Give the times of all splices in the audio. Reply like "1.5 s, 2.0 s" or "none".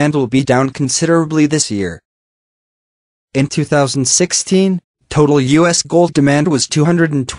none